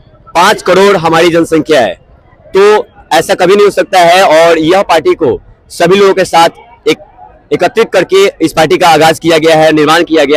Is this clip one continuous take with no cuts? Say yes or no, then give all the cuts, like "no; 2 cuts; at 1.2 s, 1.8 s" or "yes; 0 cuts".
yes; 0 cuts